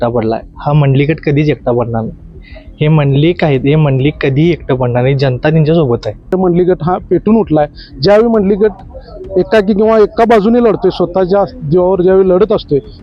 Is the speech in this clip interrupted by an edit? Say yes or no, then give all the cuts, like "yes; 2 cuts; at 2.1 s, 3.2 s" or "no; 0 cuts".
yes; 1 cut; at 6.3 s